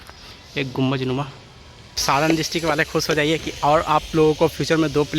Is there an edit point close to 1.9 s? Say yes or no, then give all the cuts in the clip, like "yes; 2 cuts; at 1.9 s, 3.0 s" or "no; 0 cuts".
yes; 1 cut; at 1.9 s